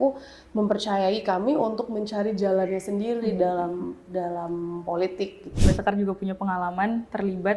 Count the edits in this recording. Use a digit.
1